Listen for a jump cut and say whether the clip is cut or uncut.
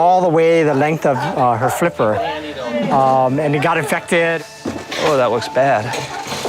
cut